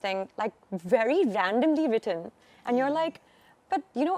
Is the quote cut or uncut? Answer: uncut